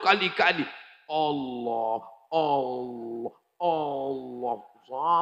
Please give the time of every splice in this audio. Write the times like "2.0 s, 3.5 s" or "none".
none